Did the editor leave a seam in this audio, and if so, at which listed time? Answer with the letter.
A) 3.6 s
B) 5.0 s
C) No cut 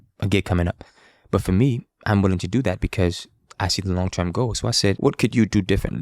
B